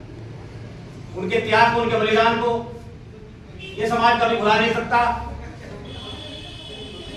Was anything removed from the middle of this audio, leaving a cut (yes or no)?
no